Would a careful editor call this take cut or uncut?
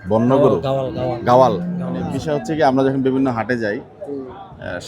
cut